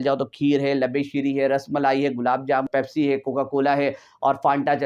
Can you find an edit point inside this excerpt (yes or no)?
yes